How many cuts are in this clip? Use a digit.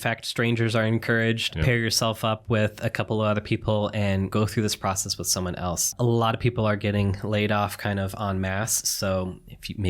3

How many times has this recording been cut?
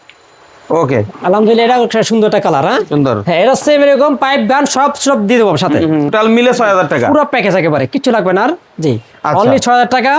1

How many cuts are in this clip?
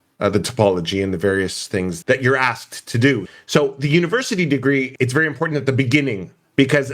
3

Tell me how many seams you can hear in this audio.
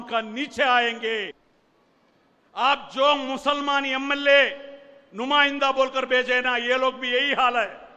1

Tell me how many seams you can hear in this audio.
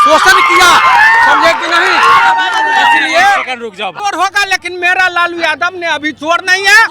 1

